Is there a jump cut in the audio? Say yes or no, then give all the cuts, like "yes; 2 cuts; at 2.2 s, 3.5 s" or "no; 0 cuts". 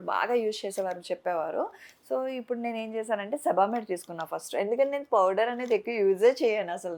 no; 0 cuts